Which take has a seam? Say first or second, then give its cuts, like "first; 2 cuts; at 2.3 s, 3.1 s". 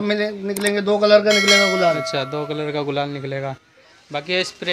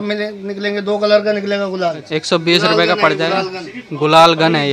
second; 1 cut; at 2.0 s